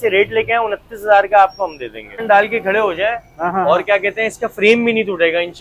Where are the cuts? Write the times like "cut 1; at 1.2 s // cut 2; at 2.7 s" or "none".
cut 1; at 2.2 s